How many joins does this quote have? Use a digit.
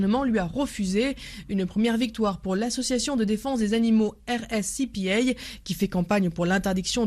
1